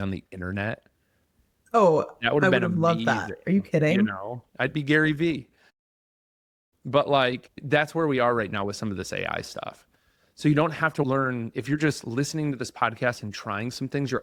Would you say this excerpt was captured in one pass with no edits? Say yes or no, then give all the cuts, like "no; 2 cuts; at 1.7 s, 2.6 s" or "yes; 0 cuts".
yes; 0 cuts